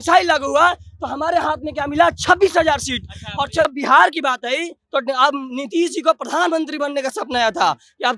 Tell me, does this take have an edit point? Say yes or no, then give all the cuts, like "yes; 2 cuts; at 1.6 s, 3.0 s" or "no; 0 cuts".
yes; 1 cut; at 3.7 s